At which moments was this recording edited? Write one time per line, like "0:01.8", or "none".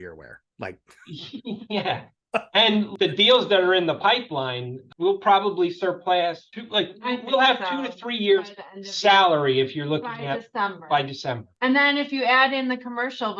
none